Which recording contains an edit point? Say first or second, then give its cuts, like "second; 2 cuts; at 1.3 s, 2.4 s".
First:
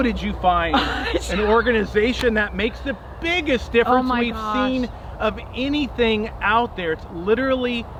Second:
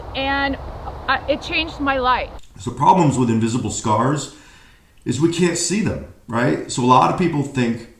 second; 1 cut; at 2.4 s